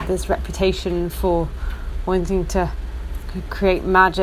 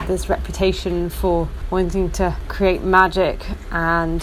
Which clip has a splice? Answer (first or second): second